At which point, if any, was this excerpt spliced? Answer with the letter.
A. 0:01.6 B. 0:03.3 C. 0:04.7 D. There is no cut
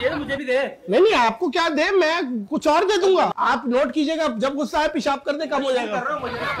B